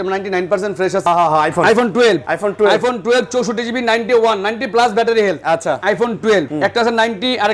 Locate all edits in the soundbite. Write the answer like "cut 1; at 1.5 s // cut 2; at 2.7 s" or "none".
cut 1; at 1.1 s // cut 2; at 2.3 s // cut 3; at 6.5 s